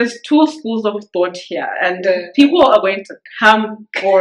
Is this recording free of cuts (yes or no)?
yes